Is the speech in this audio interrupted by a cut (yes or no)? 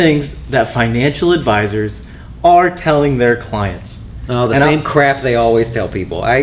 no